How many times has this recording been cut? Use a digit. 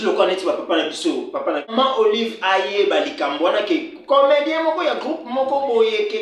1